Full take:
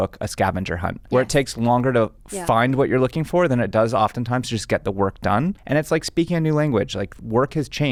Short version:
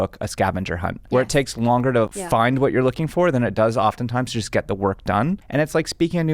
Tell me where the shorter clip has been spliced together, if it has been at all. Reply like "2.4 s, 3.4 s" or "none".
2.2 s

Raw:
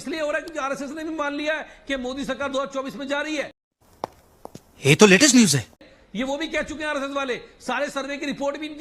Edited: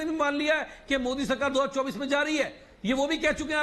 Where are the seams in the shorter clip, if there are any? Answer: 2.7 s

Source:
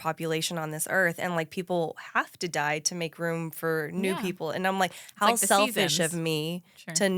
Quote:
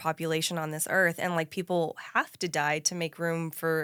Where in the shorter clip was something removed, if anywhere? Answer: none

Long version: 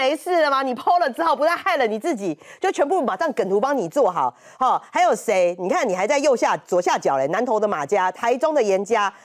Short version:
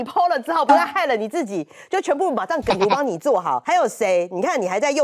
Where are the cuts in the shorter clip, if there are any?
3.6 s

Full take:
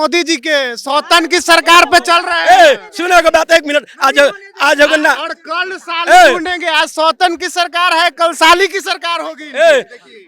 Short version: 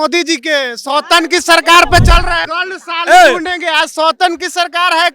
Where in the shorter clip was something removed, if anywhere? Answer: 2.3 s

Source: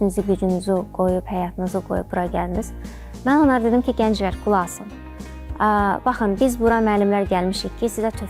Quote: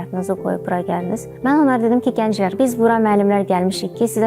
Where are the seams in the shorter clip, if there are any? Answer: 1.3 s, 2.5 s

